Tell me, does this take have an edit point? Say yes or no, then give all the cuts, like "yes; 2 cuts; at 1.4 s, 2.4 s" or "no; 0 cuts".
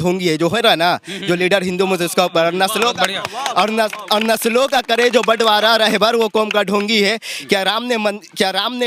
no; 0 cuts